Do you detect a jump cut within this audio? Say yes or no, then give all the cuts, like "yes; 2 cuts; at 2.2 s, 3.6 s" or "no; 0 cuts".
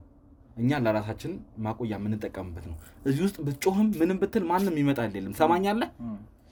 no; 0 cuts